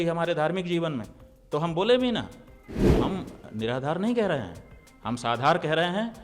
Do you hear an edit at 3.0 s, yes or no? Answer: yes